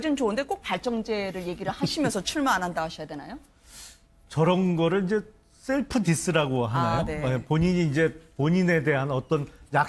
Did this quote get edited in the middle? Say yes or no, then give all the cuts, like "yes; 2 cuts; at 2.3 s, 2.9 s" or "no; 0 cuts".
yes; 1 cut; at 7.4 s